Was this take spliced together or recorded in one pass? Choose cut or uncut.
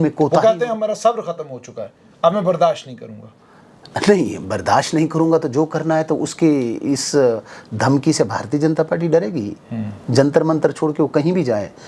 uncut